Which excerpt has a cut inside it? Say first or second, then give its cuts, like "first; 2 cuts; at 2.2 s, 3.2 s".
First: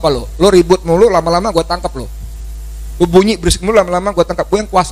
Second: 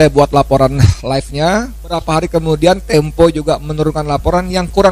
second; 1 cut; at 2.0 s